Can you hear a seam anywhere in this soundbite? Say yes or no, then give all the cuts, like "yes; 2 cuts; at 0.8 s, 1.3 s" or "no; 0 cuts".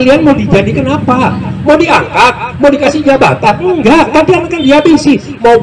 no; 0 cuts